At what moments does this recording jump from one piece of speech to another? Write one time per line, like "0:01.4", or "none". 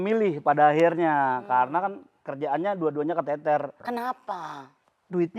0:03.8